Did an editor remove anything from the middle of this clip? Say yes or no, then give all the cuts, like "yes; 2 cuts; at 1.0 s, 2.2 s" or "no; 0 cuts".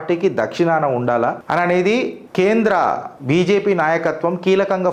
yes; 3 cuts; at 1.4 s, 2.2 s, 3.1 s